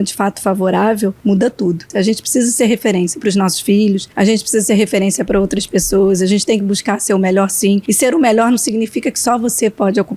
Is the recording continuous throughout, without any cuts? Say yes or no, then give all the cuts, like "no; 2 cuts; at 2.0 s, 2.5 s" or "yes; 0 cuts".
no; 3 cuts; at 1.6 s, 4.1 s, 7.9 s